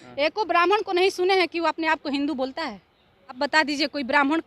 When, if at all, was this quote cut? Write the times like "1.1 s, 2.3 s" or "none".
3.4 s